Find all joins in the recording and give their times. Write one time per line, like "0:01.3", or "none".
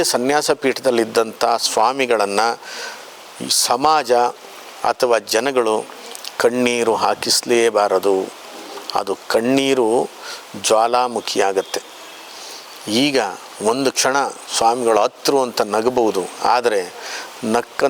none

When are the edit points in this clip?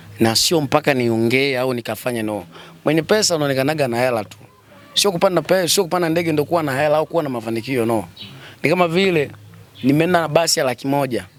none

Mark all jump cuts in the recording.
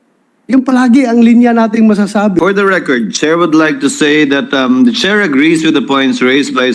0:02.4

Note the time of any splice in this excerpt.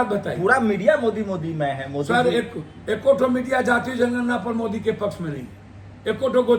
none

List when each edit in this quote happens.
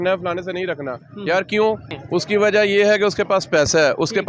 0:01.9

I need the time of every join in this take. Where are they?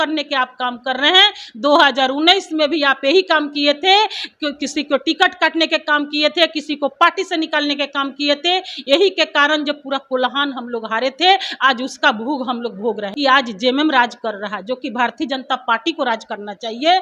0:13.1

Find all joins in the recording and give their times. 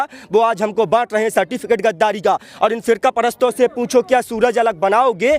0:02.5

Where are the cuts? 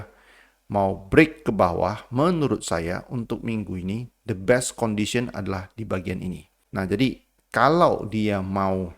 0:06.5

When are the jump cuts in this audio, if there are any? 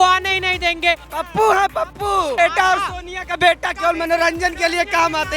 0:01.1
0:02.3

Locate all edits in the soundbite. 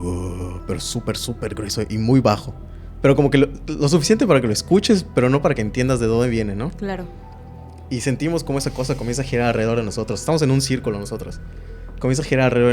none

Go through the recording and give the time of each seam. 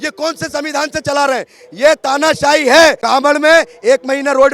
0:03.0

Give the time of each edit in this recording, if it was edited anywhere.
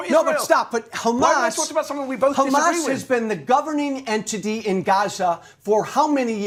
none

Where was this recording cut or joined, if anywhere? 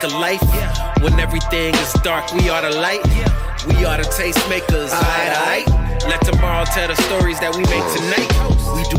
none

